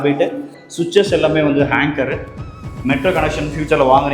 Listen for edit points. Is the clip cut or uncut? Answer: cut